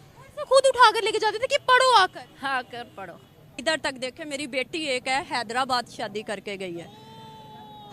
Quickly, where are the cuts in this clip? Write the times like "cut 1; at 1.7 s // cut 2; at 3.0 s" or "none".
cut 1; at 3.5 s